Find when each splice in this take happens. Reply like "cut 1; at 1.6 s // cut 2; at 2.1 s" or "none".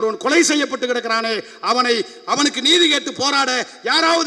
none